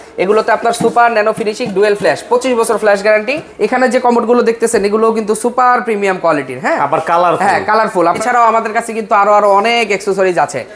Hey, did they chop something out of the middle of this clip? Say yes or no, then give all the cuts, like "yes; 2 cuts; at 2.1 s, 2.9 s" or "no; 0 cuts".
yes; 2 cuts; at 3.4 s, 8.2 s